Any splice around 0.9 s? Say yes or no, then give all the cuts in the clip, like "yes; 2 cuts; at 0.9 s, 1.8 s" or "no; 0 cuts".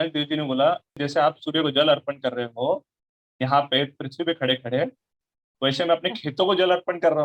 yes; 1 cut; at 0.9 s